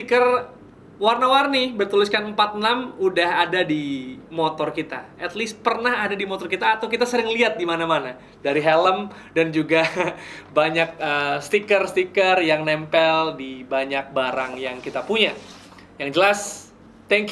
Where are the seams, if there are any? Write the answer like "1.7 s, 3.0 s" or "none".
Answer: none